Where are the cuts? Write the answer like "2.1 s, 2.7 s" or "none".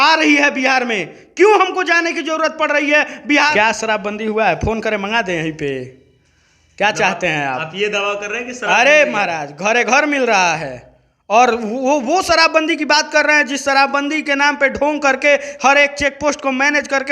3.5 s